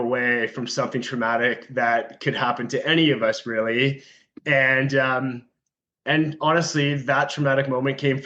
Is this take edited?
no; 0 cuts

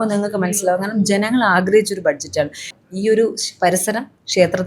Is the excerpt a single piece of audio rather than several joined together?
no; 1 cut; at 2.8 s

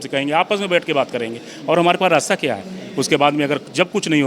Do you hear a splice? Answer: no; 0 cuts

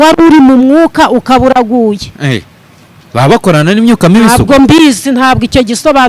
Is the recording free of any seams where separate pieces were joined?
yes; 0 cuts

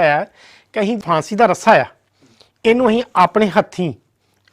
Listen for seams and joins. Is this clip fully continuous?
no; 1 cut; at 1.0 s

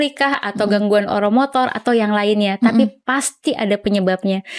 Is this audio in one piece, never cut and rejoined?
yes; 0 cuts

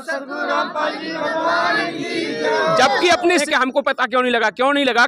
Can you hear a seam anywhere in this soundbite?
yes; 1 cut; at 3.4 s

